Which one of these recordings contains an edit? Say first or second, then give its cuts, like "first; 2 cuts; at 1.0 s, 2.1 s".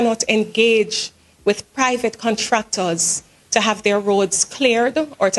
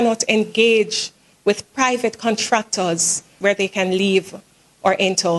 second; 1 cut; at 3.3 s